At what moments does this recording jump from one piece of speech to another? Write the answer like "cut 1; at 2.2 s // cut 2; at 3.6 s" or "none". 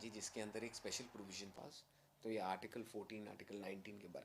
cut 1; at 1.5 s